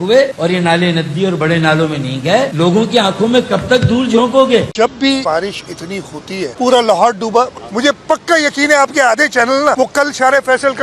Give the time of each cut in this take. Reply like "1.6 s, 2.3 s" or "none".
4.7 s